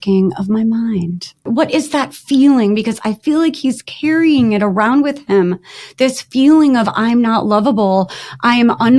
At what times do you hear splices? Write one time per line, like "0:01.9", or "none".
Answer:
0:01.4